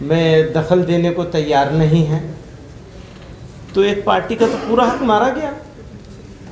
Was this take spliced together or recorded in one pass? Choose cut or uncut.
uncut